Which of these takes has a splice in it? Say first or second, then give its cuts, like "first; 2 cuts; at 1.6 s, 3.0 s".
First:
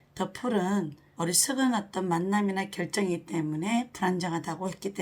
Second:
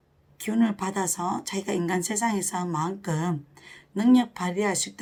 first; 1 cut; at 1.0 s